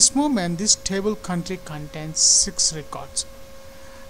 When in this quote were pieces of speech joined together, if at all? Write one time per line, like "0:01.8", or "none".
none